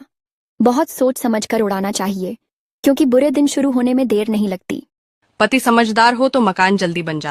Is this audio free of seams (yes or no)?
yes